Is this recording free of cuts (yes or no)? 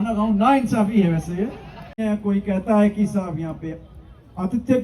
no